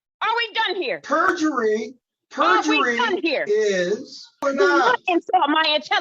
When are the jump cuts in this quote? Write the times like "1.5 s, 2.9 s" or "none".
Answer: 4.4 s